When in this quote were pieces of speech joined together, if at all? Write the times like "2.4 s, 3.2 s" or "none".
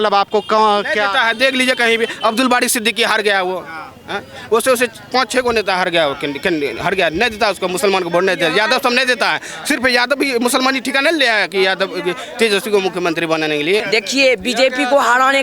13.8 s